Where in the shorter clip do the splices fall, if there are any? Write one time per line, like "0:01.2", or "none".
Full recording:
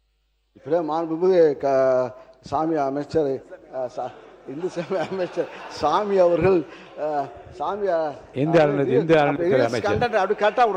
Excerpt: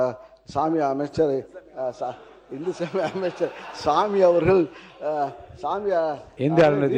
none